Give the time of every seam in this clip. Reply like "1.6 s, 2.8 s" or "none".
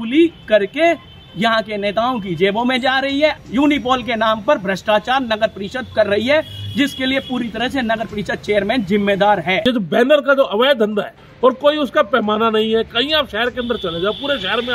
3.4 s, 9.6 s, 11.2 s